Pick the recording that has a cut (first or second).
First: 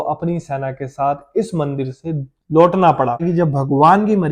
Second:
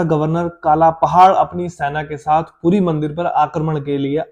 first